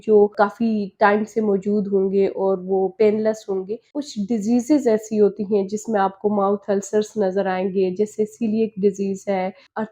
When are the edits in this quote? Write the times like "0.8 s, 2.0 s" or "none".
3.8 s